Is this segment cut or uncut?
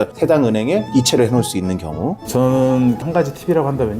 cut